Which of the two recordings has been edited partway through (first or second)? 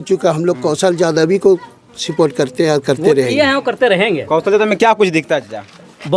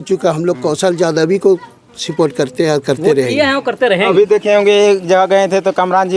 second